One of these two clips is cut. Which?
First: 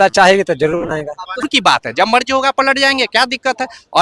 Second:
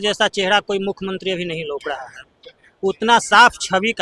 first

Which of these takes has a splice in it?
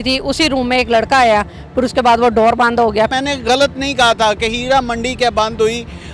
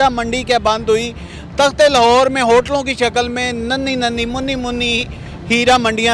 first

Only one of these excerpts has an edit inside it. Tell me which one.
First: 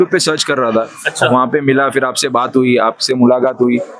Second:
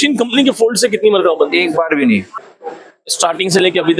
second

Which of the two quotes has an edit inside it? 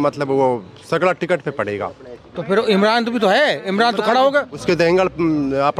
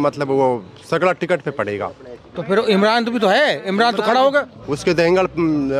first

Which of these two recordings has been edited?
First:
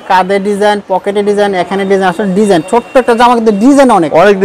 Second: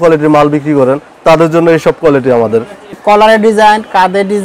second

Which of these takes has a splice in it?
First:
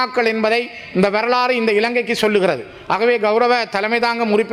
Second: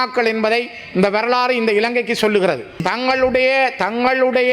second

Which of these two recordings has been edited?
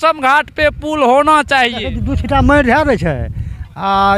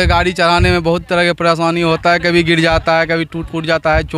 first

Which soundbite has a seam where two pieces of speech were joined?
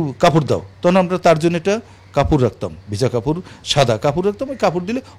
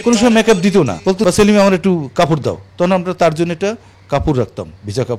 second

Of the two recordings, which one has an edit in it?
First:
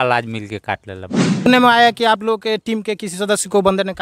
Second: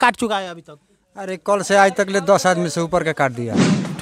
first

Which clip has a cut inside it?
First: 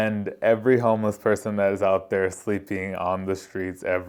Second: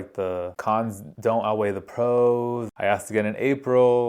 second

